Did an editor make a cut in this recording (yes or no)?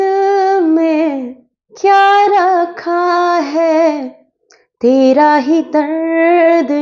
no